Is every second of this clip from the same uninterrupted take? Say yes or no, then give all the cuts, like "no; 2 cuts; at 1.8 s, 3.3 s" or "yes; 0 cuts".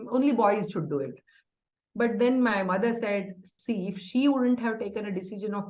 yes; 0 cuts